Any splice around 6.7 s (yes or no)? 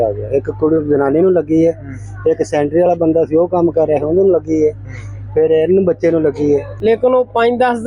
yes